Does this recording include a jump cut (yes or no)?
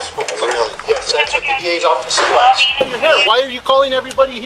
yes